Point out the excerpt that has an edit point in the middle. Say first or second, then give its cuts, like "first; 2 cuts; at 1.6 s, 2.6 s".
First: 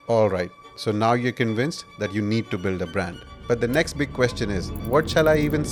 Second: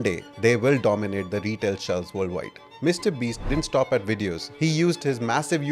second; 2 cuts; at 2.6 s, 4.4 s